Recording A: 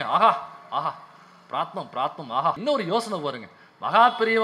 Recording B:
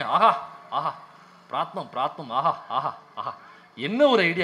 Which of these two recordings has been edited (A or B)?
A